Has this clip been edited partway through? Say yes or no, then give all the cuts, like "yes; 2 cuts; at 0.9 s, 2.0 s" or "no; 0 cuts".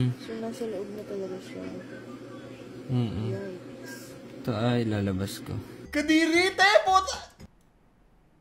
yes; 1 cut; at 5.7 s